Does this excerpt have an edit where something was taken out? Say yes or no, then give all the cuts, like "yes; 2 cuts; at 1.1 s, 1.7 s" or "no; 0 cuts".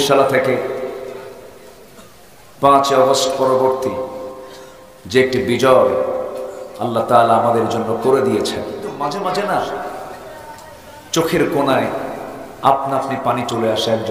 yes; 1 cut; at 8.8 s